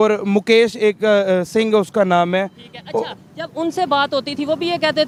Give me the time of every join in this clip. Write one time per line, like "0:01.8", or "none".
none

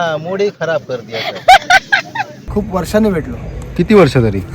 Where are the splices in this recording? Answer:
0:02.4

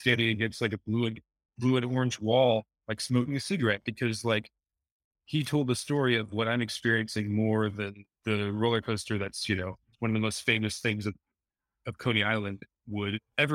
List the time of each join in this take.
none

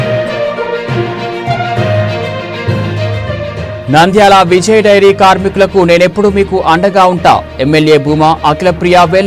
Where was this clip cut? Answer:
0:03.7

